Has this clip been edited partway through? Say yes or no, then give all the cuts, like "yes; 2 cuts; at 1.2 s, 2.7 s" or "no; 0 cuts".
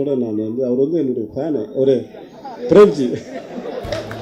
no; 0 cuts